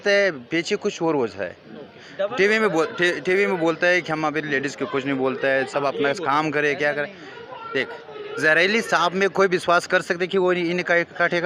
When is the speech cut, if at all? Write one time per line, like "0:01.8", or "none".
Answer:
none